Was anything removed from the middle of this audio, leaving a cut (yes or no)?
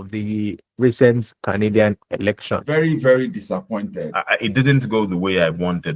yes